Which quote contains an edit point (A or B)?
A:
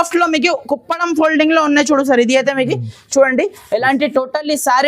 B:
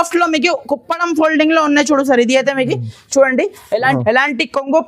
B